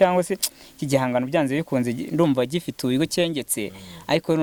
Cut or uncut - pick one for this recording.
uncut